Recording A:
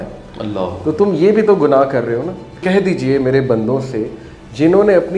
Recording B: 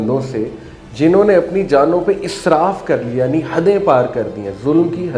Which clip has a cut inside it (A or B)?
A